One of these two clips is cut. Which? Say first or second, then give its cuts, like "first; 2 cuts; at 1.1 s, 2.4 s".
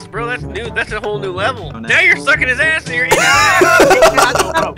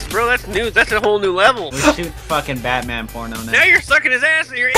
first; 1 cut; at 1.7 s